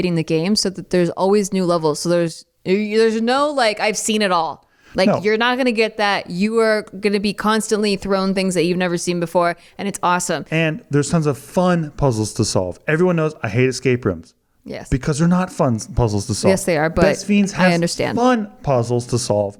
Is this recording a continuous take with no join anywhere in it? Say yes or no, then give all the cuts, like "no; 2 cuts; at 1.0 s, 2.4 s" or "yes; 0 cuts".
yes; 0 cuts